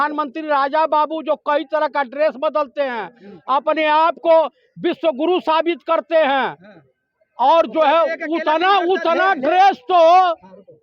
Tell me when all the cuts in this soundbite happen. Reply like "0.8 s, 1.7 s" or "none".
none

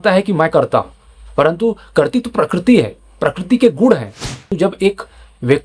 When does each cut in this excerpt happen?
4.5 s

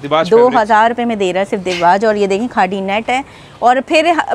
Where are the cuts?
none

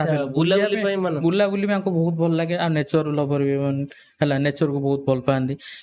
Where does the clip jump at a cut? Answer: none

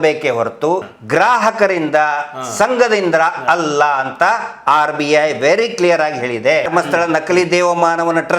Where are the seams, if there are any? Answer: 0.9 s, 6.7 s

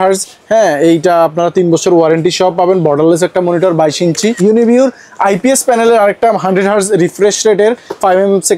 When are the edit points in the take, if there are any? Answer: 4.4 s

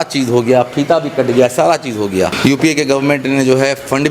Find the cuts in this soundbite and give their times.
2.3 s

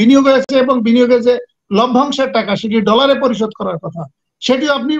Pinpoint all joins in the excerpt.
none

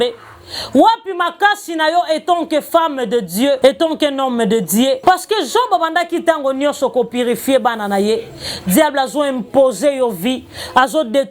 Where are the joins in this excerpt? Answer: 3.6 s, 5.0 s

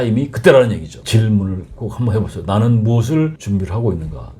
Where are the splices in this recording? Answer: 0.9 s, 3.4 s

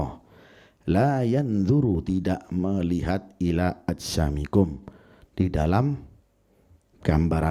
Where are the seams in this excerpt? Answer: none

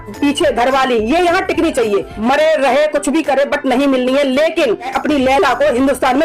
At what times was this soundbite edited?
2.1 s, 4.9 s

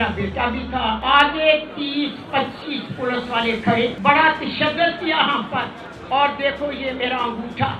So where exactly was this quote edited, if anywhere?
1.0 s, 4.0 s

